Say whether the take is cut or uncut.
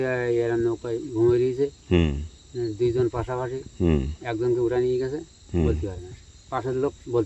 uncut